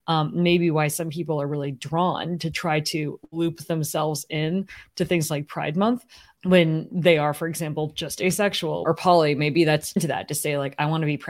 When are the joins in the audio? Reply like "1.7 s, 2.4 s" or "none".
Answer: 8.8 s, 10.0 s